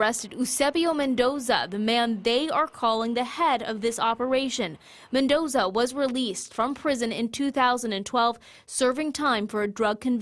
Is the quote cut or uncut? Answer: uncut